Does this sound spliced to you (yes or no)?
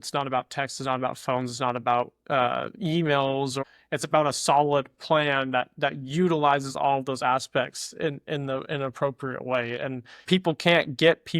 yes